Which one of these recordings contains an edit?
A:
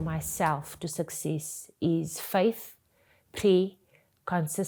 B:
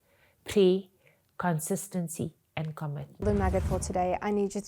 B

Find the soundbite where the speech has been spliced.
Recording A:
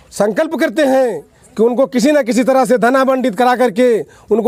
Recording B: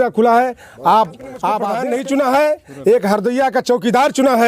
B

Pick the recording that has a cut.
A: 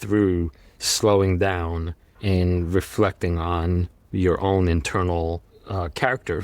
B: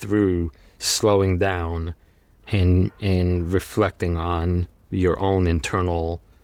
A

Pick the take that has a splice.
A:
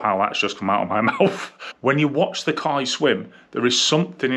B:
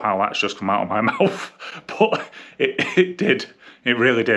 A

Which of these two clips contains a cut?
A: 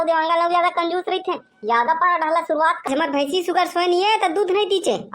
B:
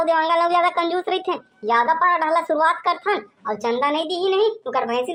A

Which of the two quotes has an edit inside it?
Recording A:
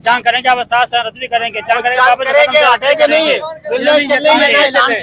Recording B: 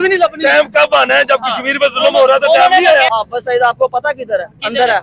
B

